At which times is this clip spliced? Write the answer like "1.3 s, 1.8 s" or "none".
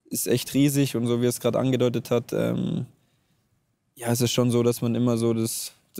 none